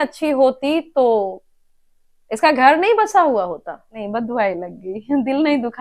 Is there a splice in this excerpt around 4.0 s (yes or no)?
yes